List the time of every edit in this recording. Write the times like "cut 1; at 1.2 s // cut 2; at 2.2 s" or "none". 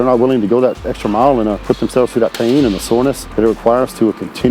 cut 1; at 1.6 s // cut 2; at 3.2 s